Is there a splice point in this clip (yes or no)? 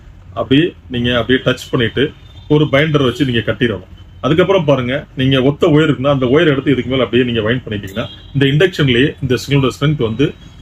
no